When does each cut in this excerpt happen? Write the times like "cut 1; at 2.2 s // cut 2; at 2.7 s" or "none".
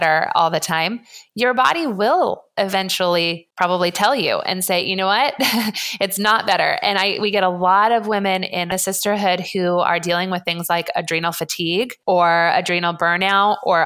cut 1; at 3.4 s // cut 2; at 8.7 s // cut 3; at 11.9 s